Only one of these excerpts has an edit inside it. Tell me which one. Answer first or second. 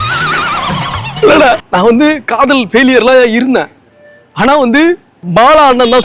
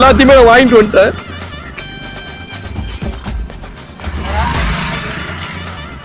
first